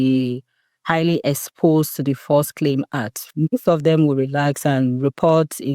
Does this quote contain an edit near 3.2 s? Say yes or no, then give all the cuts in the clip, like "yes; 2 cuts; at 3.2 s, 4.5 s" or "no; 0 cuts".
yes; 1 cut; at 3.2 s